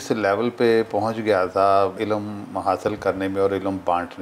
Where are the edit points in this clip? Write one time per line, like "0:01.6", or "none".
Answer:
0:02.0